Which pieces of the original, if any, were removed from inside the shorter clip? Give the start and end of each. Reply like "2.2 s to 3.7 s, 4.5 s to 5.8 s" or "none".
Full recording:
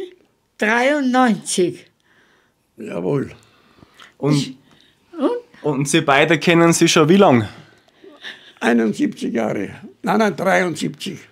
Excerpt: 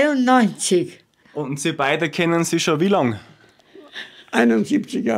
2.1 s to 5.5 s